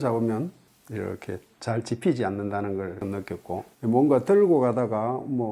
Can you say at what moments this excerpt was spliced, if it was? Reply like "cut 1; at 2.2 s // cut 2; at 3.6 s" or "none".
none